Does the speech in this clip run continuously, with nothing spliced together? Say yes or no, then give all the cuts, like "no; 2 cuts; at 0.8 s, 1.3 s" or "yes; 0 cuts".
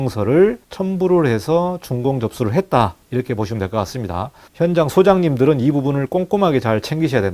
no; 1 cut; at 4.4 s